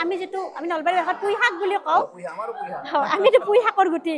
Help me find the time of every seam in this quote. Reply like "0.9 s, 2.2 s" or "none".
none